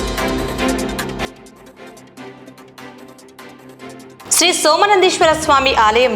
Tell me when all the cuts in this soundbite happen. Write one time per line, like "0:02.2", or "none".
0:01.2
0:02.7
0:04.2